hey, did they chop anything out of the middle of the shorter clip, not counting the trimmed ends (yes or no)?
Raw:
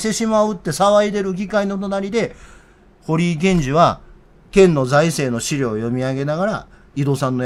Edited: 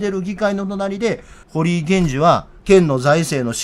yes